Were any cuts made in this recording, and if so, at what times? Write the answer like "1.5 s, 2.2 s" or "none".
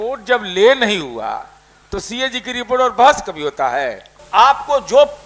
4.2 s